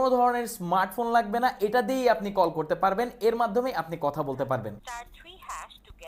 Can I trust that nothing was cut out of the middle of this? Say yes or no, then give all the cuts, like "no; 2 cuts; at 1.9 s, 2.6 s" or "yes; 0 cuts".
yes; 0 cuts